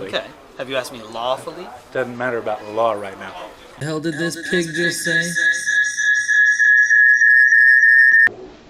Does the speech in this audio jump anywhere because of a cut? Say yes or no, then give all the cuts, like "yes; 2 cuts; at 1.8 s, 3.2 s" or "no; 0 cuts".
no; 0 cuts